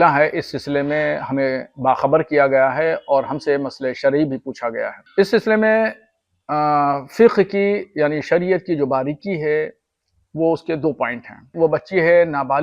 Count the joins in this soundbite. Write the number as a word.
two